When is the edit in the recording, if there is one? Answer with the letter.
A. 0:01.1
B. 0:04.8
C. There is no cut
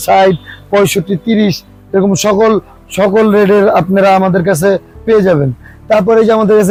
C